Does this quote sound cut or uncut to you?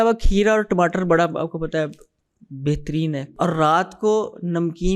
cut